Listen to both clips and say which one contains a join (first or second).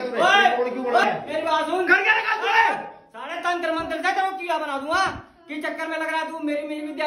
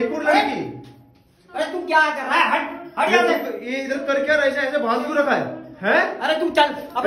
first